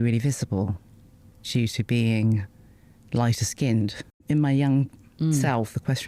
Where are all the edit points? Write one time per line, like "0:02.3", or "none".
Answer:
0:01.4
0:04.2